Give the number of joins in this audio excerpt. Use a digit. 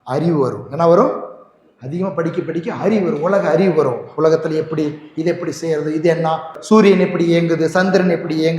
1